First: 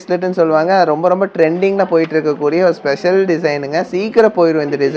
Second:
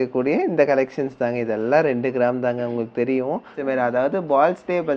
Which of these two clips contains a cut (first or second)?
second